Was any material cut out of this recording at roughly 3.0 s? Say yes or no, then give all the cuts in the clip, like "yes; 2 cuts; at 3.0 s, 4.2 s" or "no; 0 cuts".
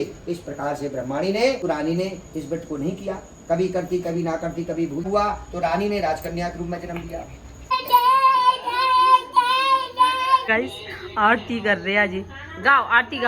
no; 4 cuts; at 1.6 s, 5.0 s, 7.6 s, 10.5 s